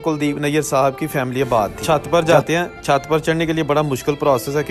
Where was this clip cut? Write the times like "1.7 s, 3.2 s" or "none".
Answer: 1.8 s

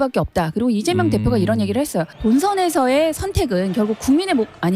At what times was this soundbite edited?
none

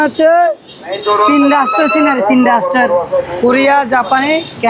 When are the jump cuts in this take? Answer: none

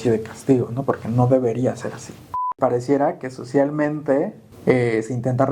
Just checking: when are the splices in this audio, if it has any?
2.5 s, 4.5 s

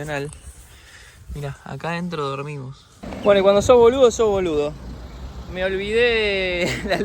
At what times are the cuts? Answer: 3.0 s

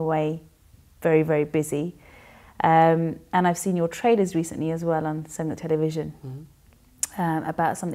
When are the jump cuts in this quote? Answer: 6.1 s

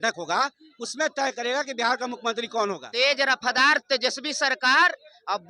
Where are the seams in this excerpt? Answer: 2.8 s

